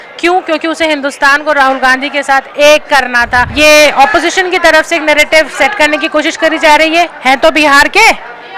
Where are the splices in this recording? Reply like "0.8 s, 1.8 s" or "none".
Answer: 3.5 s